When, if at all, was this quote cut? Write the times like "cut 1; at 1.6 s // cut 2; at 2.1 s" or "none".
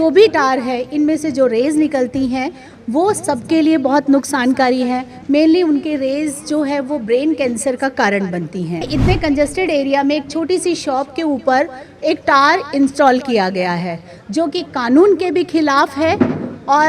cut 1; at 8.9 s